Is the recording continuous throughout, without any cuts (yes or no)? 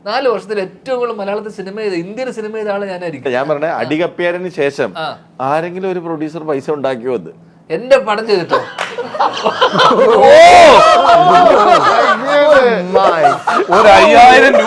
no